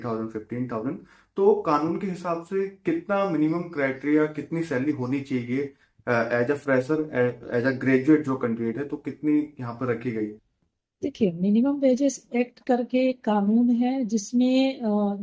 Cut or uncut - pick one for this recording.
uncut